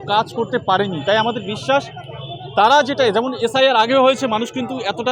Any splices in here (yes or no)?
no